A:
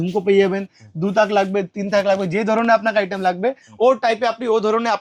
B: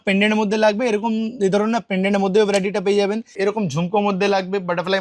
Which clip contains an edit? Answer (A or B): B